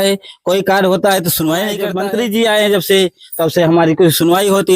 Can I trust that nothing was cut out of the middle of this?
no; 1 cut; at 1.9 s

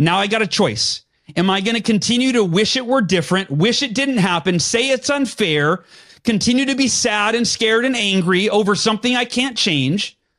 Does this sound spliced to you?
no; 0 cuts

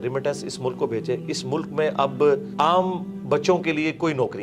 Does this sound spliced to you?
yes; 1 cut; at 2.5 s

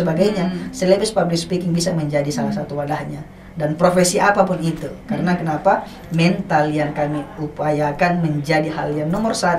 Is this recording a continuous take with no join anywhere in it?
yes; 0 cuts

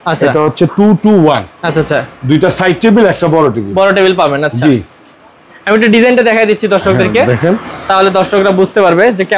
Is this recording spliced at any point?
no; 0 cuts

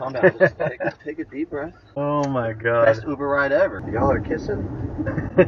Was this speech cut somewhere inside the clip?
yes; 1 cut; at 3.8 s

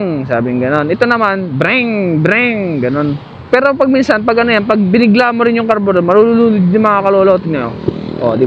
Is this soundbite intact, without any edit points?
no; 1 cut; at 3.3 s

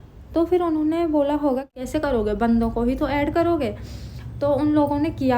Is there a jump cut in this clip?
yes; 1 cut; at 1.7 s

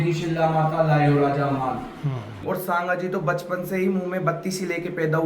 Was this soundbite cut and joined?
yes; 1 cut; at 2.4 s

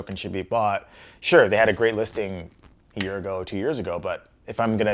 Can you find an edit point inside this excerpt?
no; 0 cuts

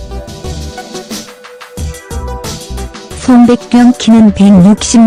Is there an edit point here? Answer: no; 0 cuts

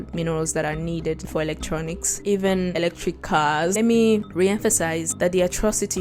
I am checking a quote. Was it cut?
yes; 2 cuts; at 2.1 s, 3.7 s

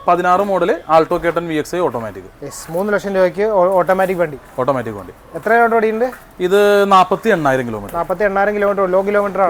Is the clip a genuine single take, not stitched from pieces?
yes; 0 cuts

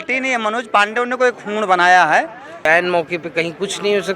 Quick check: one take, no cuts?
no; 1 cut; at 2.6 s

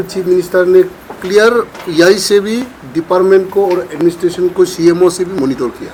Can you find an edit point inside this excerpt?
no; 0 cuts

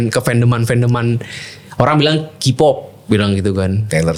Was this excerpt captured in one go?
yes; 0 cuts

